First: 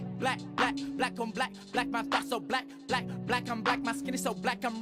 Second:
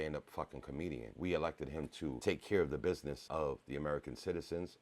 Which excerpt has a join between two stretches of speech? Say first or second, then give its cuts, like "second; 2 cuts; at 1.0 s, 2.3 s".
second; 3 cuts; at 1.1 s, 2.2 s, 3.2 s